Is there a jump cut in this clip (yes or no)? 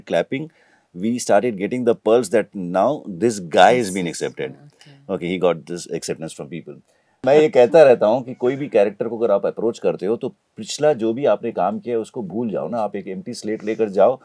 yes